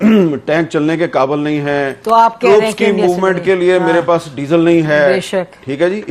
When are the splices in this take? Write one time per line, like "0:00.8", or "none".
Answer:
none